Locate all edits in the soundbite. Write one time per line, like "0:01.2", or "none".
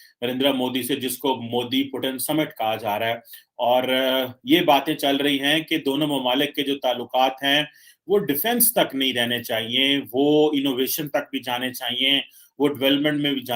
none